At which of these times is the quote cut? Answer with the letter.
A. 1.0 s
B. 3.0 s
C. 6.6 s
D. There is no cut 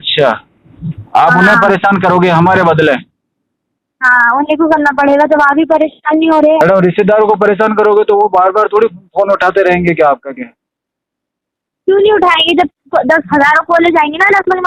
C